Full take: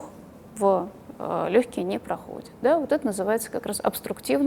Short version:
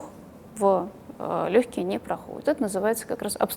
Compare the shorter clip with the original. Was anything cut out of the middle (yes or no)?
yes